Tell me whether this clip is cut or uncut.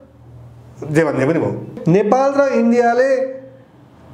cut